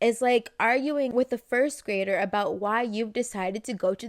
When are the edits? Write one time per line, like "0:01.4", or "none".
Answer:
0:01.1